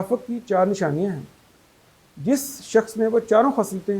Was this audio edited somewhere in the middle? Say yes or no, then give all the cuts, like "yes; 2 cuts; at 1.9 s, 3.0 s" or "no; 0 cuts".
no; 0 cuts